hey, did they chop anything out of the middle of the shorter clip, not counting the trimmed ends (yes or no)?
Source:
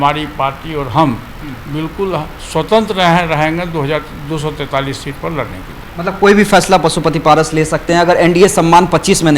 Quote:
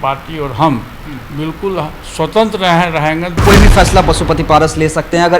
yes